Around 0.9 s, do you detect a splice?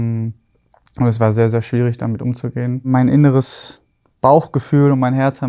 no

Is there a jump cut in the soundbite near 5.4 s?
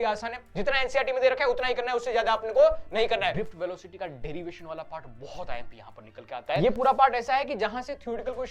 no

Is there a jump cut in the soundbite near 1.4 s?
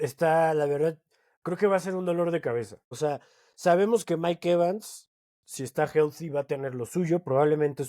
no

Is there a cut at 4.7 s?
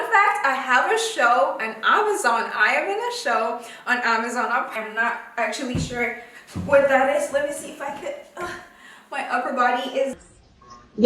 yes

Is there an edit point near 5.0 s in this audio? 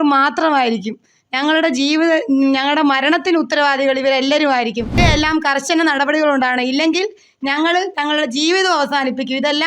yes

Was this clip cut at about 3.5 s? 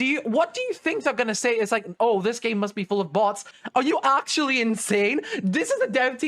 yes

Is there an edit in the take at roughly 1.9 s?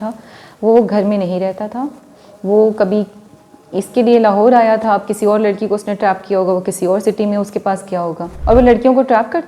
no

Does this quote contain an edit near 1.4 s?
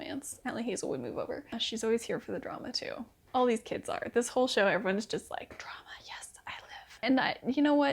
yes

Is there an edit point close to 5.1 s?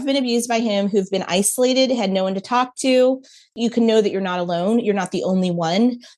no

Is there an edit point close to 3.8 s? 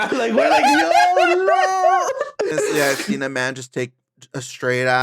no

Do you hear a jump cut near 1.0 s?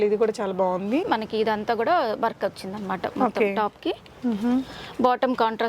yes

